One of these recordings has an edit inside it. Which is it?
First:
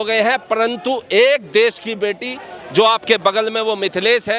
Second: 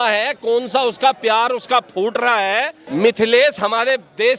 second; 1 cut; at 2.8 s

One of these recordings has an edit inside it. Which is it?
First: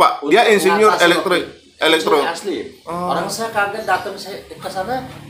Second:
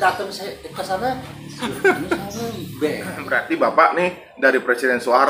second; 1 cut; at 3.3 s

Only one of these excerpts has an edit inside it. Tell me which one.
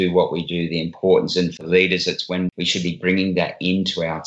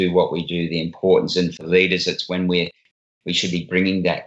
first; 1 cut; at 2.5 s

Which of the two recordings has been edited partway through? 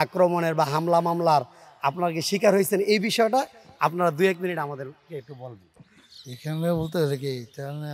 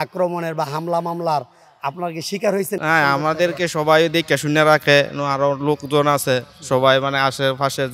second; 1 cut; at 2.8 s

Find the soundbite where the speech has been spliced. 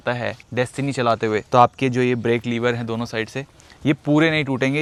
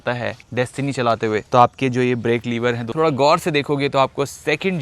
second; 1 cut; at 2.8 s

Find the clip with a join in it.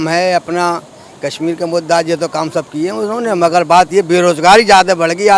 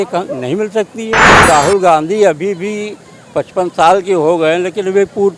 second; 1 cut; at 1.4 s

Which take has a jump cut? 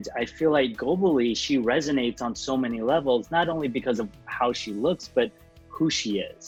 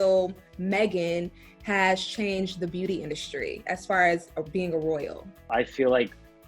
second; 1 cut; at 5.5 s

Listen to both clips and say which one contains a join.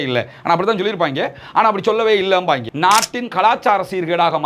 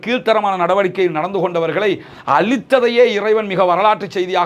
first; 1 cut; at 2.7 s

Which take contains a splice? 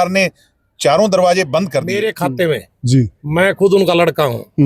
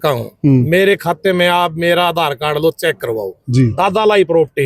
first; 1 cut; at 1.9 s

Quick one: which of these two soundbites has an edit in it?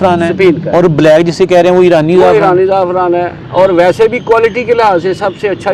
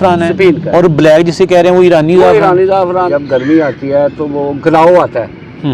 second; 1 cut; at 3.1 s

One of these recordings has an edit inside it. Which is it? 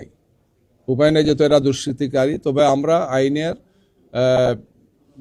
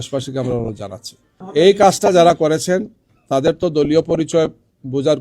second; 1 cut; at 1.4 s

